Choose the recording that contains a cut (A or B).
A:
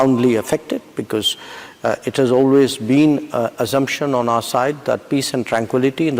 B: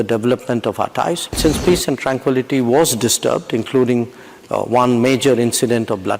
B